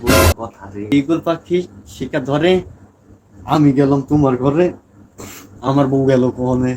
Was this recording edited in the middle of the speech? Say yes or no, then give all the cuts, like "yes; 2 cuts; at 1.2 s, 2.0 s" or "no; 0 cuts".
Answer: yes; 1 cut; at 0.9 s